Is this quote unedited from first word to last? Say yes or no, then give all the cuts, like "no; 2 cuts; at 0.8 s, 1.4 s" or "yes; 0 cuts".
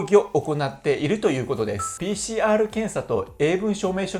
no; 1 cut; at 1.9 s